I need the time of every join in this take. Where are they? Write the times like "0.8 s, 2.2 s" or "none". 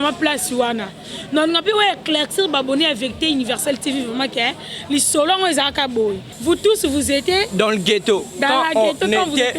6.3 s

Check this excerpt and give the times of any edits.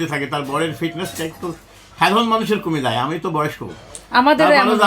none

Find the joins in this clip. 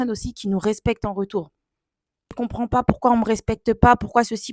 2.3 s

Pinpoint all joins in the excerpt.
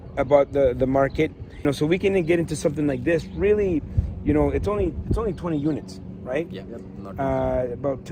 1.5 s

